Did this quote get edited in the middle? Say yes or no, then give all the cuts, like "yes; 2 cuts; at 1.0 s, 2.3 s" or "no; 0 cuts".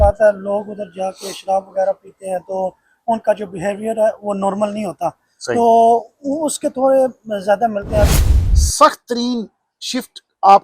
yes; 1 cut; at 8.3 s